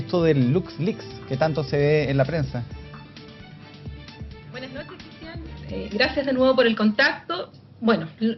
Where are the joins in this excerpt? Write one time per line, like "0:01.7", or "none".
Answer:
none